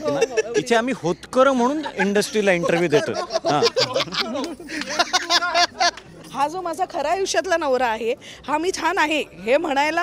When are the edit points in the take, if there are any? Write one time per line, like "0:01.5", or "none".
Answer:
0:06.2